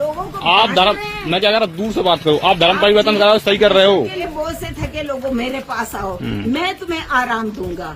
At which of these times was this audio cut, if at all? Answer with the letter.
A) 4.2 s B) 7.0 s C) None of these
A